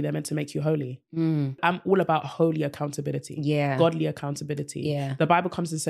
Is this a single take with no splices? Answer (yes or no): no